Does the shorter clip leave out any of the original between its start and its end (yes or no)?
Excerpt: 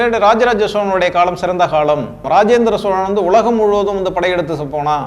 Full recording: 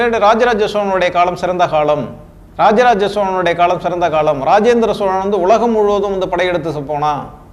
yes